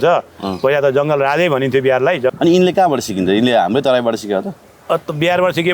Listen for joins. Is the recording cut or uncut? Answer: cut